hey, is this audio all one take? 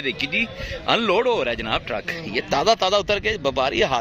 yes; 0 cuts

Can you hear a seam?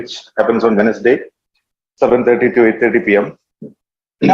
yes; 1 cut; at 3.2 s

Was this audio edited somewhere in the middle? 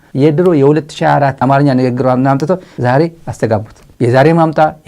yes; 1 cut; at 1.4 s

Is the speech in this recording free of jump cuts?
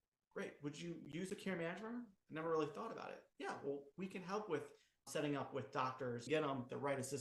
no; 2 cuts; at 5.1 s, 6.3 s

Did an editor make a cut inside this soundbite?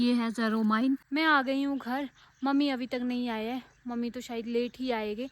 yes; 1 cut; at 1.1 s

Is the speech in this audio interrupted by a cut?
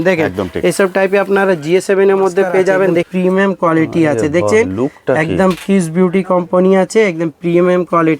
yes; 1 cut; at 3.1 s

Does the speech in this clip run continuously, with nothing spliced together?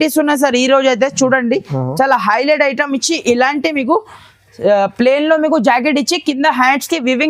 yes; 0 cuts

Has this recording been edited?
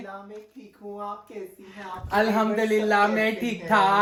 no; 0 cuts

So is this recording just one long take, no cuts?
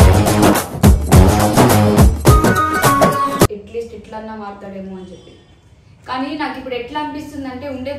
no; 1 cut; at 3.5 s

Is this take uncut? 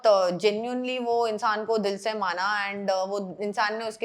yes; 0 cuts

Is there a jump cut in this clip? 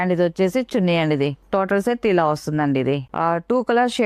yes; 1 cut; at 3.1 s

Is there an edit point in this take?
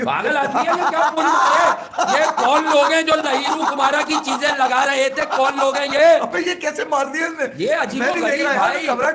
no; 0 cuts

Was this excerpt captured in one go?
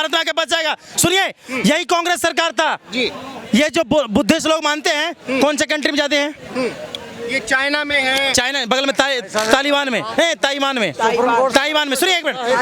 yes; 0 cuts

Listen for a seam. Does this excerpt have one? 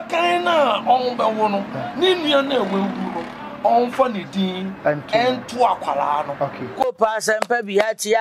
yes; 1 cut; at 6.8 s

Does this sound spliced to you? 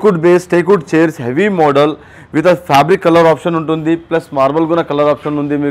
no; 0 cuts

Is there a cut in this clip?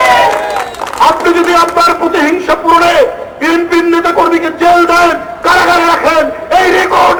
no; 0 cuts

